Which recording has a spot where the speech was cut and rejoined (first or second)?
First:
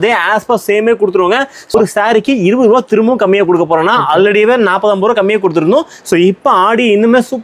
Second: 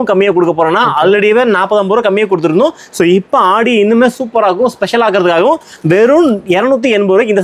first